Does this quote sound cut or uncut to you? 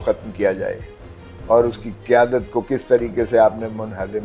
uncut